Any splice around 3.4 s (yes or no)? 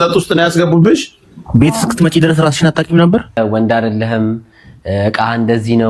yes